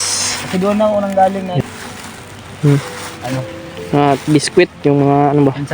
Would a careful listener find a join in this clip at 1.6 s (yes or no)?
yes